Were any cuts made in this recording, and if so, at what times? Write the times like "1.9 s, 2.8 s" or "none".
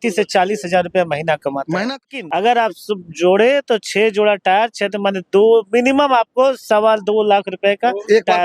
2.1 s